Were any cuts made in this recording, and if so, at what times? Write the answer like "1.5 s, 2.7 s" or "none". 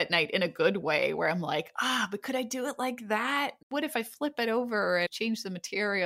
3.6 s, 5.1 s

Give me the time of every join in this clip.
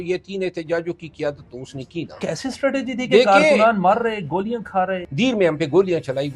2.1 s, 5.0 s

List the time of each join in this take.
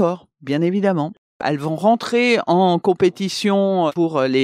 1.4 s

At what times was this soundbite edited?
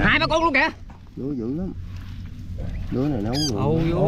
none

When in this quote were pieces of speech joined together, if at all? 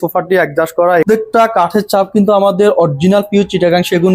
1.1 s

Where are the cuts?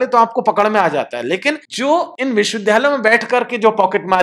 2.0 s

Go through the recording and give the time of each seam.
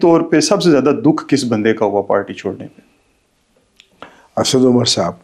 none

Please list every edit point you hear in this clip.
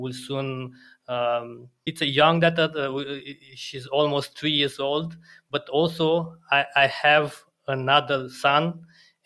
1.9 s

